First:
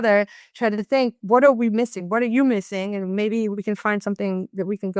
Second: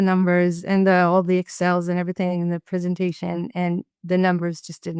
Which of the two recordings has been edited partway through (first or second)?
first